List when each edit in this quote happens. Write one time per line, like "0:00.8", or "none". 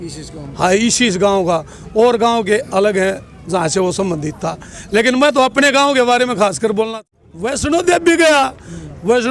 0:07.0